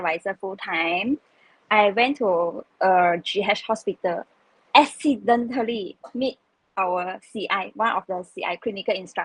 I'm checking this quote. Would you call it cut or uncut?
uncut